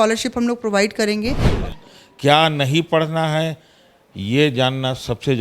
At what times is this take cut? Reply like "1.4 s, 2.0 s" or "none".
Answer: 1.5 s